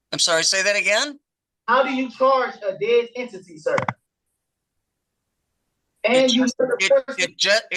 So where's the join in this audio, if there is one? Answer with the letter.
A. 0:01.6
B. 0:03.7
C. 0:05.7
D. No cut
D